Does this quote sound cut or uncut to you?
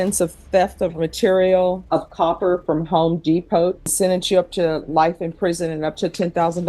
cut